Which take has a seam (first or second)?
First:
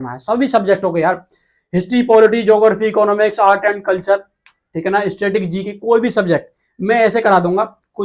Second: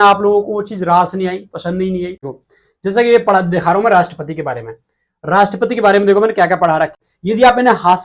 second